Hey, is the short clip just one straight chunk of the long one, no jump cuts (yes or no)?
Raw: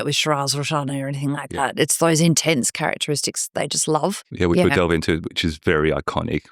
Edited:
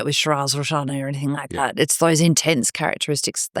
yes